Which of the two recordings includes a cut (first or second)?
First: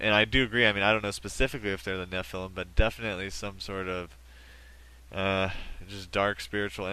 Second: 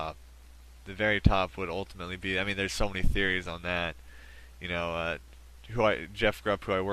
first